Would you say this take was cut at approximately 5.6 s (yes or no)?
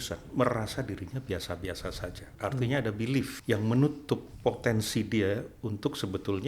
no